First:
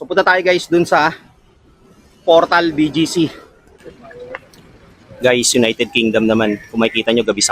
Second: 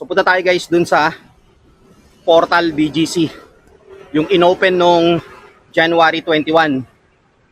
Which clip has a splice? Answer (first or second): first